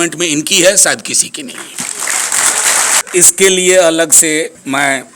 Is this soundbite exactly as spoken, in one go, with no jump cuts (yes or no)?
no